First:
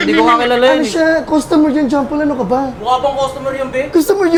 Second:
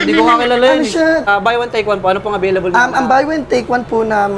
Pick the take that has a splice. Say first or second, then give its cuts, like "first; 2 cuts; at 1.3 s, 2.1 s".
second; 1 cut; at 1.2 s